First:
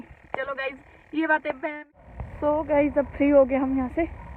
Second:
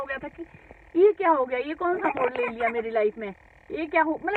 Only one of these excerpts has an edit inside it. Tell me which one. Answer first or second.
first